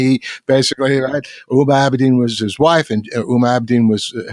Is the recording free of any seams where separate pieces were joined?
no; 1 cut; at 2.4 s

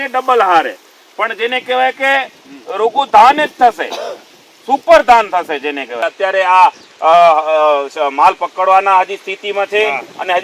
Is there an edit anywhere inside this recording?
yes; 1 cut; at 5.9 s

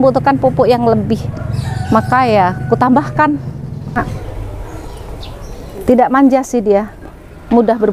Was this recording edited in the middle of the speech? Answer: yes; 1 cut; at 4.0 s

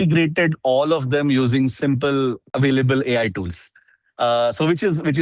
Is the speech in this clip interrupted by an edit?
yes; 1 cut; at 2.4 s

